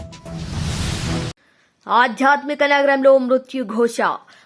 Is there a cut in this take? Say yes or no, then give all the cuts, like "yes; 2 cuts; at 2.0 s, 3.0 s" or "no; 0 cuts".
yes; 1 cut; at 1.4 s